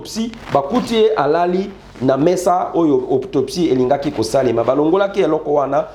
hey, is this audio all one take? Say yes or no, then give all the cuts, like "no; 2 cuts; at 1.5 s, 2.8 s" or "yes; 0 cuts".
yes; 0 cuts